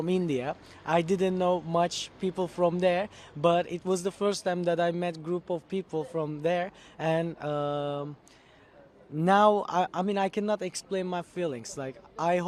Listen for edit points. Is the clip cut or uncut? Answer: uncut